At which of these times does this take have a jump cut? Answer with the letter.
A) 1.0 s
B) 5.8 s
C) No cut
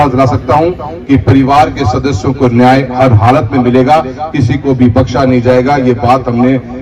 C